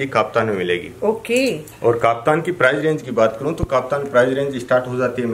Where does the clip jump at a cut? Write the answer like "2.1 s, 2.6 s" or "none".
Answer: none

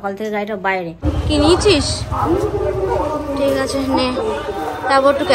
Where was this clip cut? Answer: 1.1 s

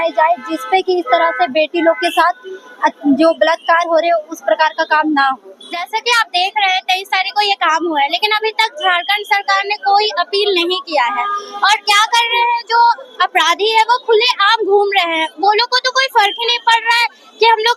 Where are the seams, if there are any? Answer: none

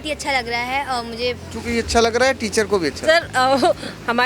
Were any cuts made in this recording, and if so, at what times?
1.5 s

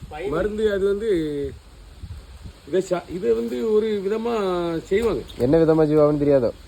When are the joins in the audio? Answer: none

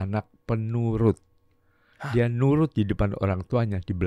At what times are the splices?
none

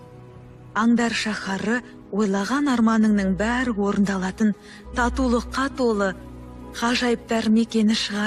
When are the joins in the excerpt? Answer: none

